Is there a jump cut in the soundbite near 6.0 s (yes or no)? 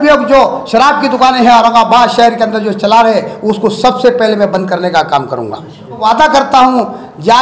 yes